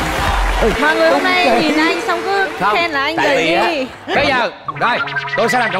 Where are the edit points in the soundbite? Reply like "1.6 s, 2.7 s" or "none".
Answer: 4.1 s